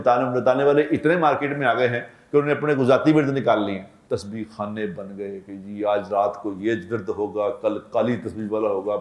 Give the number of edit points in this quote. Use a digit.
1